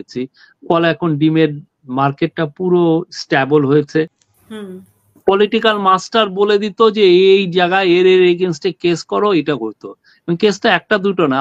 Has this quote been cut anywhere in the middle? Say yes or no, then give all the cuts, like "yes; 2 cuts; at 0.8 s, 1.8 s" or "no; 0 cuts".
yes; 1 cut; at 4.2 s